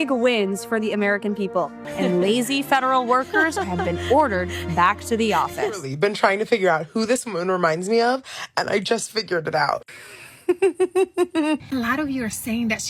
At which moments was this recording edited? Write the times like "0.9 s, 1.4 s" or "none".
1.8 s, 5.9 s, 11.6 s

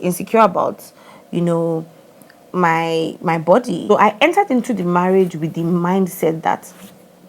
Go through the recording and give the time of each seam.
3.8 s

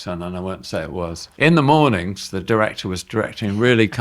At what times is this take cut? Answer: 1.2 s

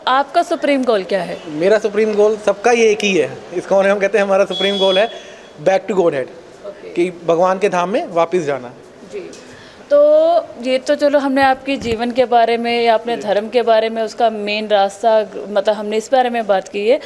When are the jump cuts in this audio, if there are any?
none

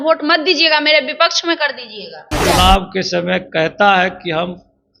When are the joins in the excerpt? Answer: 2.3 s

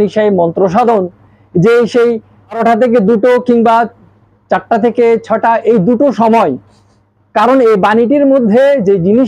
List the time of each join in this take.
2.6 s

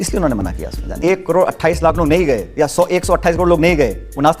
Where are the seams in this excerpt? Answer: 0.9 s

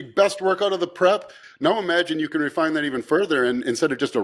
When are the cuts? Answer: 1.4 s

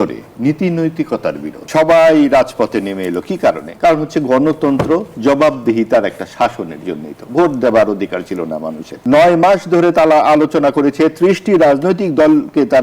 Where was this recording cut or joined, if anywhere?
1.5 s, 3.7 s, 8.9 s

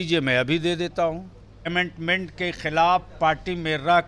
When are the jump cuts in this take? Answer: 1.5 s

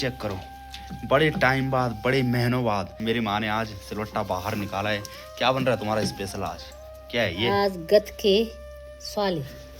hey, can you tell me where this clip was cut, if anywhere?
2.9 s

